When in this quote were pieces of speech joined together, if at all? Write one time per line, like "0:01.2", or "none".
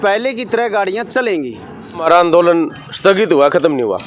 0:02.0